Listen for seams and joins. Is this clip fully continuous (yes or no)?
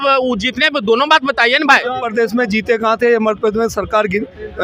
no